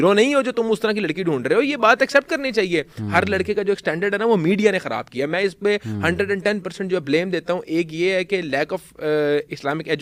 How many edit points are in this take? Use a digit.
0